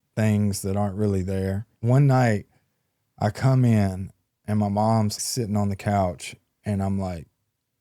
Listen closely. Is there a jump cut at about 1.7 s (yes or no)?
yes